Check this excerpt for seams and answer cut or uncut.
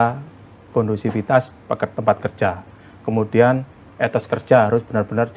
uncut